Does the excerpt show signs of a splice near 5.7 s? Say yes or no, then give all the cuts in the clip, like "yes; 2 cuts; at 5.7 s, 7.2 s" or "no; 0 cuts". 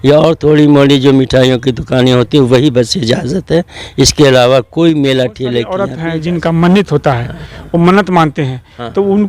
yes; 1 cut; at 5.7 s